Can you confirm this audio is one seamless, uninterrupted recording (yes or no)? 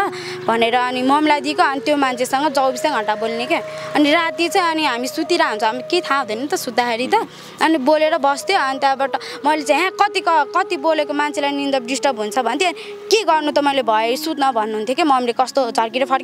yes